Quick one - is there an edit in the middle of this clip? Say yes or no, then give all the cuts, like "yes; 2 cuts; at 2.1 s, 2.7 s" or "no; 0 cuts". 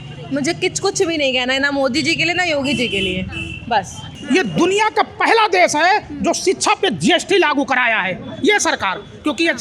yes; 1 cut; at 4.1 s